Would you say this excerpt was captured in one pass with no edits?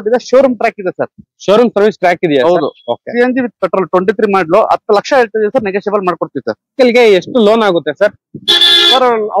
no; 1 cut; at 6.7 s

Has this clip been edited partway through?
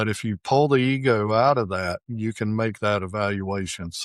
no; 0 cuts

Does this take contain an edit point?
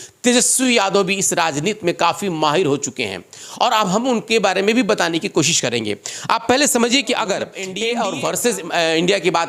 yes; 1 cut; at 7.6 s

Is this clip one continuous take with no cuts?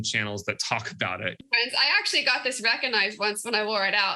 no; 1 cut; at 1.4 s

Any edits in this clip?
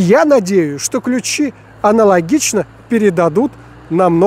no; 0 cuts

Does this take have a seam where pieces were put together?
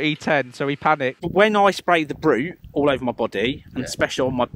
yes; 1 cut; at 1.2 s

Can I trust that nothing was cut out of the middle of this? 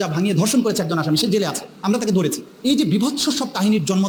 yes; 0 cuts

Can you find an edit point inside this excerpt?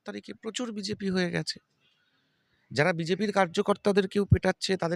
no; 0 cuts

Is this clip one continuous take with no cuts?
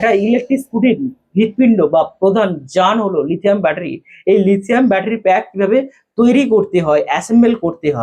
yes; 0 cuts

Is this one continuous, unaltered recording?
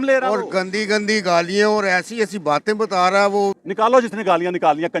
no; 1 cut; at 3.6 s

